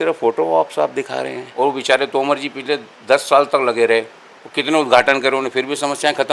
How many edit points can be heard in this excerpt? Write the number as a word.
one